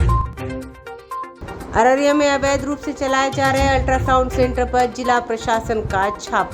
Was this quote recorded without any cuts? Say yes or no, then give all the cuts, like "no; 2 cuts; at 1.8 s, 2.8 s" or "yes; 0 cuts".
no; 1 cut; at 1.2 s